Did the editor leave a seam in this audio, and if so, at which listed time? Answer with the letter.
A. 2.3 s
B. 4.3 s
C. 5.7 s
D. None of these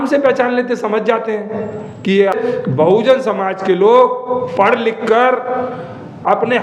A